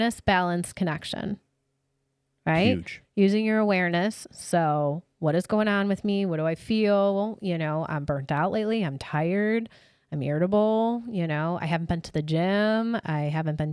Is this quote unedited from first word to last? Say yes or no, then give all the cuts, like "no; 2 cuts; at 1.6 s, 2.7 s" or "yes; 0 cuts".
yes; 0 cuts